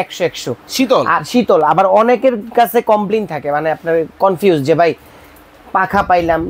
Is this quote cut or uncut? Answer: uncut